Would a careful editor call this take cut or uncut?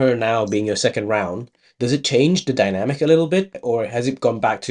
cut